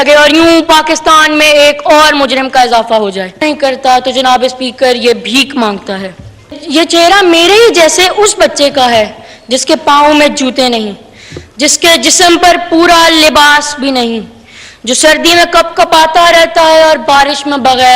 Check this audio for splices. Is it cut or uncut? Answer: cut